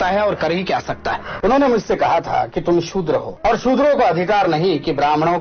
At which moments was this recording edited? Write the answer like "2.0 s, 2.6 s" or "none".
1.3 s, 3.3 s